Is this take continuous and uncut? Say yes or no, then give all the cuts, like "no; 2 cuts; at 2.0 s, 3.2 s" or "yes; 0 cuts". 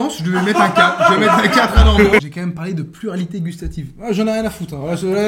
no; 1 cut; at 2.2 s